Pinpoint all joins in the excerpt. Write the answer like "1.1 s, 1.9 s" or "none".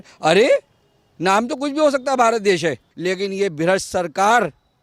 2.9 s